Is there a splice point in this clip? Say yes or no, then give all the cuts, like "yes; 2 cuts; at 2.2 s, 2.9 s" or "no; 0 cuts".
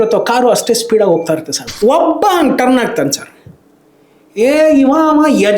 yes; 1 cut; at 1.6 s